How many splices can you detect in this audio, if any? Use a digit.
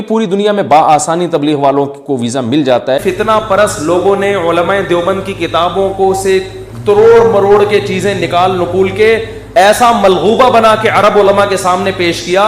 1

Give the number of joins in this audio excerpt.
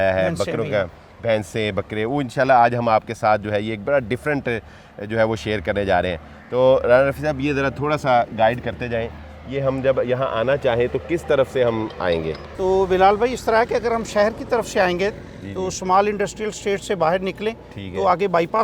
0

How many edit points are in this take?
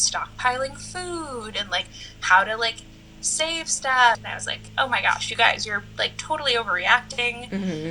1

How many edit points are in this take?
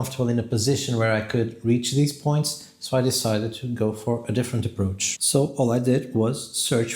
1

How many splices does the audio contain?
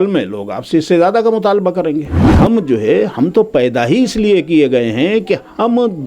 1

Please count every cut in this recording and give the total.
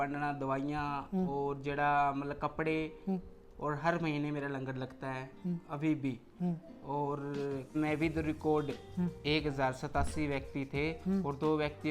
1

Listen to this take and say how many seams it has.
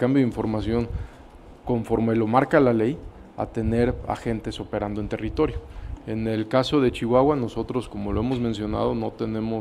0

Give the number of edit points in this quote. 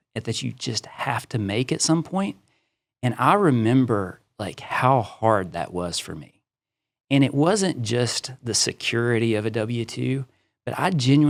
0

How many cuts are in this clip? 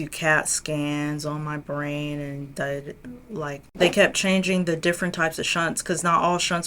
1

